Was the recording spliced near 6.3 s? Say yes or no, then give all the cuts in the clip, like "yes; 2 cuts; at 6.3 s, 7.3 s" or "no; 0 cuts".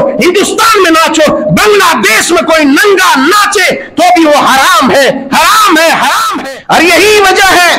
yes; 1 cut; at 6.3 s